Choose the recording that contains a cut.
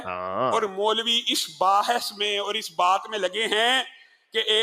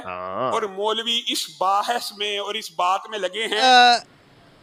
first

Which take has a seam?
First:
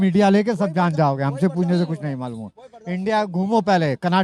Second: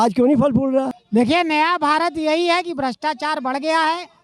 second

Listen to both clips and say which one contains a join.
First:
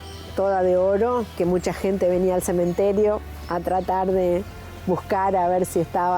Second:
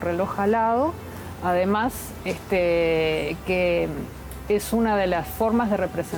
first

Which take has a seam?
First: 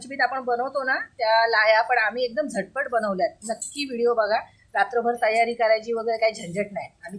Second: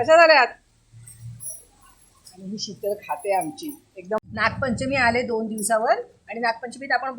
second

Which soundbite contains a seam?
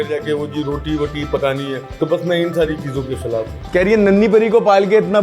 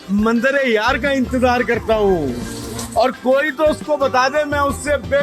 first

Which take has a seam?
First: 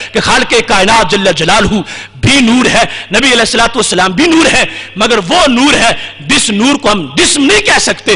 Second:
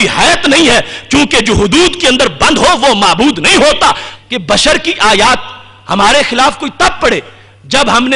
second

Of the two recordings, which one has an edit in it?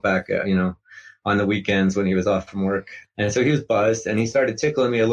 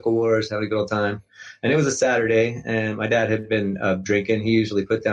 first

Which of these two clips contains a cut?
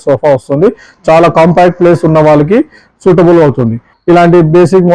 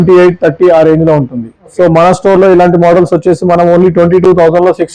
first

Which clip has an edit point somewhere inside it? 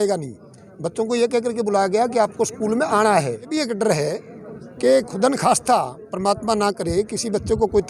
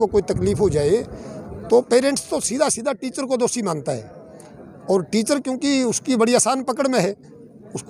first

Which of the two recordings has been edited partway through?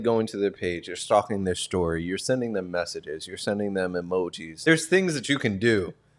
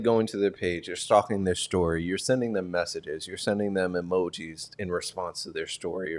first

